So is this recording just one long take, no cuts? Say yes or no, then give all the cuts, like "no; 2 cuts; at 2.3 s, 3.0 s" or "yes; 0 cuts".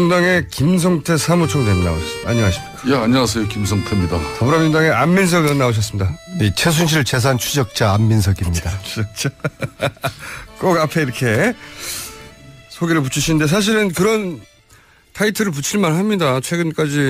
yes; 0 cuts